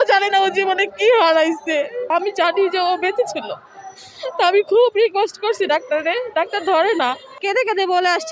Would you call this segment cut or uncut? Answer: cut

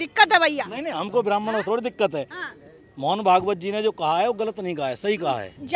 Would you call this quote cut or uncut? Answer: uncut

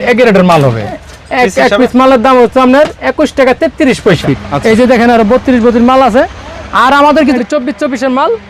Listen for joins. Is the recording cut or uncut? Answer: cut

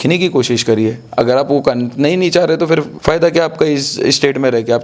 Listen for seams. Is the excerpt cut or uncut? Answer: cut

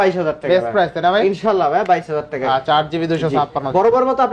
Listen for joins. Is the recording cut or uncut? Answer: uncut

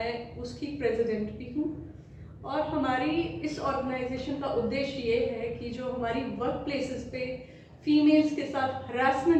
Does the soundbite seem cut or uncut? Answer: uncut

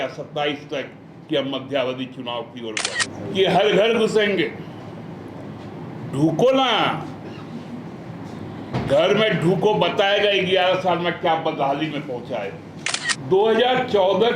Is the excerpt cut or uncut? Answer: cut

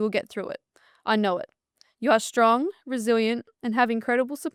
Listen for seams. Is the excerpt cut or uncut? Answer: uncut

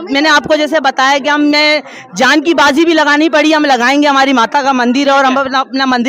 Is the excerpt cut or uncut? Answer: uncut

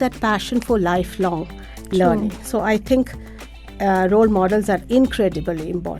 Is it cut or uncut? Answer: uncut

